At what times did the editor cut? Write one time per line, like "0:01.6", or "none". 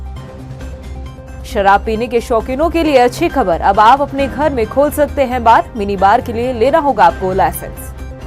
0:01.0